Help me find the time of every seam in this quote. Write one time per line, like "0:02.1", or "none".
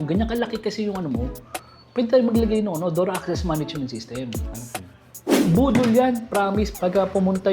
0:05.4
0:06.7